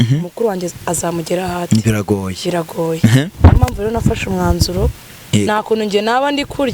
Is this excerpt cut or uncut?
uncut